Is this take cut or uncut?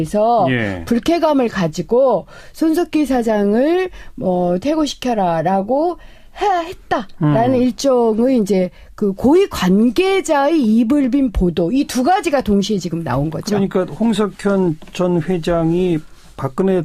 uncut